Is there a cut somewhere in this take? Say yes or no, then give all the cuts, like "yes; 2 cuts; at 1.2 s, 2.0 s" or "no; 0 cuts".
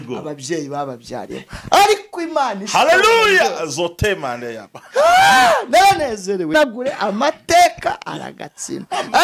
yes; 1 cut; at 6.5 s